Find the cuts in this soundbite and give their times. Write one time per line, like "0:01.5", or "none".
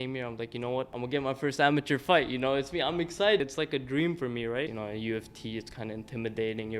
0:00.9
0:03.4
0:04.7